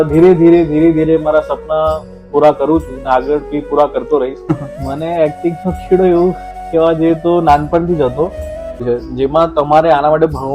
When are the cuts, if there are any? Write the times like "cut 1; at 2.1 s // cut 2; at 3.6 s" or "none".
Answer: cut 1; at 4.4 s // cut 2; at 8.8 s